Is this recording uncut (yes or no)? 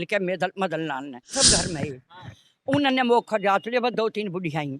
no